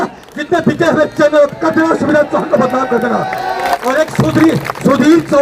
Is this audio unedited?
no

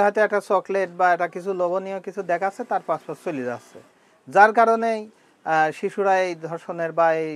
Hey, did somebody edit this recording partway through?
no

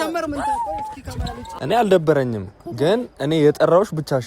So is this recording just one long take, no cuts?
no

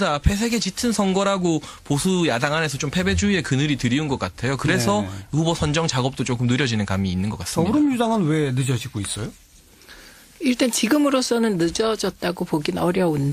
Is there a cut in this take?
yes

